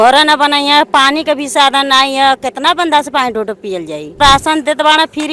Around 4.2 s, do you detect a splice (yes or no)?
yes